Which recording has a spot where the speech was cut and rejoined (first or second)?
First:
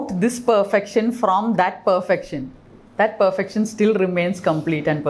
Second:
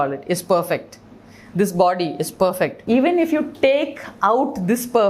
second